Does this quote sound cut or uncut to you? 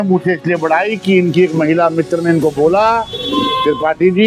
uncut